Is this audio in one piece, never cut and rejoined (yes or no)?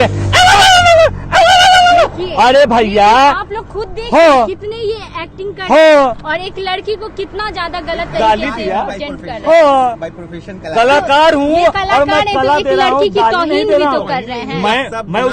yes